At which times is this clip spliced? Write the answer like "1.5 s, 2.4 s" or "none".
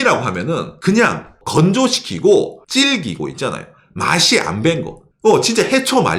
0.8 s, 1.4 s, 2.6 s